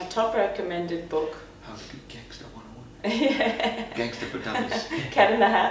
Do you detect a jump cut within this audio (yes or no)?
no